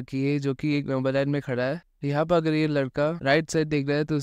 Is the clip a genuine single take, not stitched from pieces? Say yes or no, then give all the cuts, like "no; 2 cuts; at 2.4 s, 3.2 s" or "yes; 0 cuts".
yes; 0 cuts